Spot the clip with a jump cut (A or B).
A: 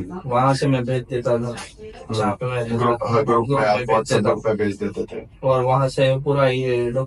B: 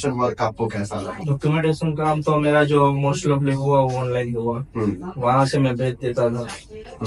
B